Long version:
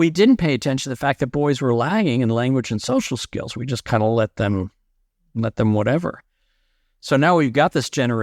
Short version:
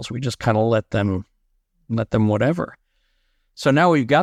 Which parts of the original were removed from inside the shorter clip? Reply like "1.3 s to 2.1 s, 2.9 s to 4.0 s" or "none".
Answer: none